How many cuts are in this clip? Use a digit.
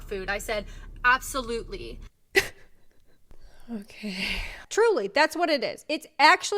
1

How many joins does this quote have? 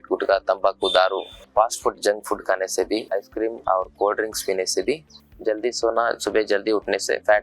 2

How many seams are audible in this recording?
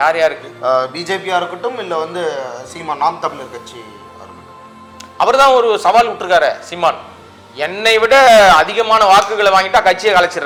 0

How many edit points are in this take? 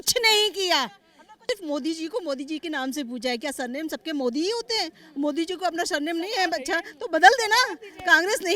1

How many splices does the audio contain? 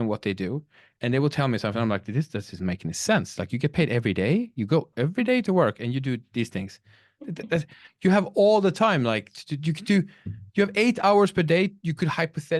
0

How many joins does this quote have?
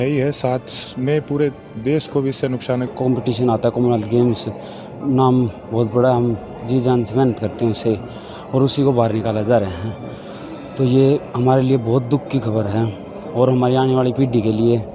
1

